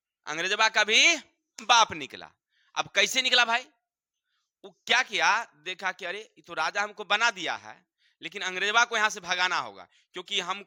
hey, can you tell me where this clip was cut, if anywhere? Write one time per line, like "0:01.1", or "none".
none